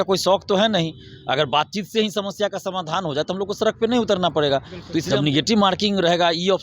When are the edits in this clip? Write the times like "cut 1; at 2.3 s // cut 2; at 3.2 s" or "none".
cut 1; at 5.0 s